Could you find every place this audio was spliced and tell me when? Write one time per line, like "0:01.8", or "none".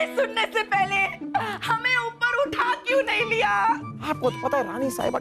0:03.9